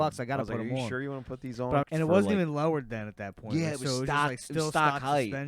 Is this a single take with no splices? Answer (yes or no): no